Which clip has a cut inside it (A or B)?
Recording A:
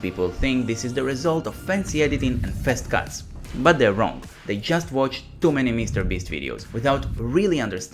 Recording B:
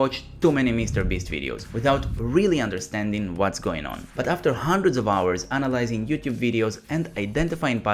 B